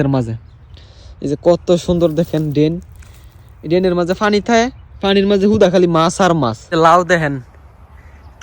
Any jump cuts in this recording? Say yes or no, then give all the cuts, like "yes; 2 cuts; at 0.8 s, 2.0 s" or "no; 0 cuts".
yes; 1 cut; at 6.6 s